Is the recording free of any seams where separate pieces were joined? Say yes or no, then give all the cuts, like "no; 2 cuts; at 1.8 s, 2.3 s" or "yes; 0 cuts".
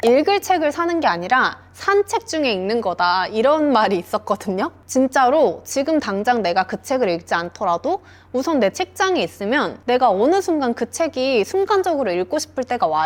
yes; 0 cuts